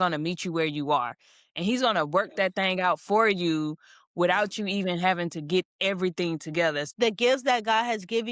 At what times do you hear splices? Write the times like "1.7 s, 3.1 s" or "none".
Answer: 6.9 s